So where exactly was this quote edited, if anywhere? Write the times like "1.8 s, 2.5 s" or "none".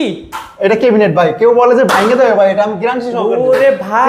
none